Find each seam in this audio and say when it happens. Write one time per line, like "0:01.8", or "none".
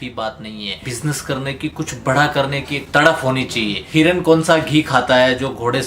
0:00.9
0:03.8